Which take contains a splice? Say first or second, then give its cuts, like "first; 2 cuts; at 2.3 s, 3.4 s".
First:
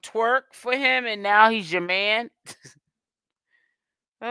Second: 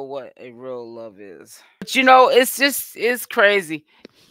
second; 1 cut; at 1.9 s